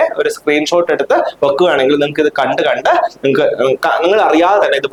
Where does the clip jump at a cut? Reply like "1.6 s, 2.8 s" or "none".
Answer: none